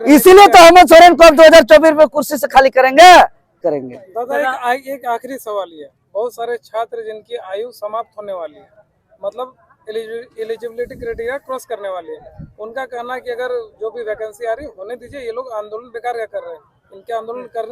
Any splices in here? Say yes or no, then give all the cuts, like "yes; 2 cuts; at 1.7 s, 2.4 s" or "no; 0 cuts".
no; 0 cuts